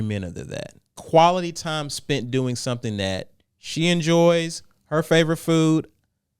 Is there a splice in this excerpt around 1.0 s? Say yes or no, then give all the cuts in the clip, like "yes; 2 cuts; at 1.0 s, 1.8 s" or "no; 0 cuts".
yes; 1 cut; at 1.0 s